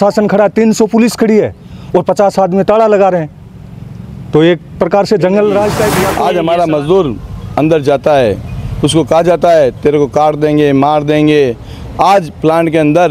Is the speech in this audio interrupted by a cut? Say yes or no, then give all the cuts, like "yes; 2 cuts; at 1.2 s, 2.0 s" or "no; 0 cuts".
yes; 1 cut; at 6.1 s